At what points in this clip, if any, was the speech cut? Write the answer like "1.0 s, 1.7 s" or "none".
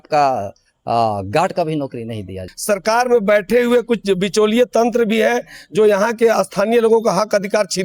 2.5 s